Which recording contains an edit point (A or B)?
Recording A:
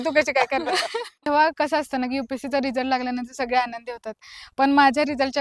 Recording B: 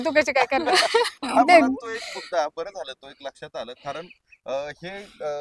A